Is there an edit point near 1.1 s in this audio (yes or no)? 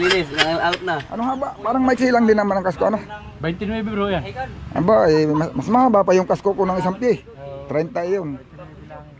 yes